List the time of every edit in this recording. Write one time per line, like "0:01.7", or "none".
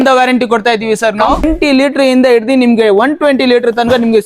0:01.4